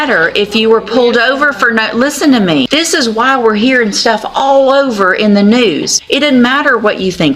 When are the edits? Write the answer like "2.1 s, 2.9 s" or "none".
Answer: 2.7 s, 5.9 s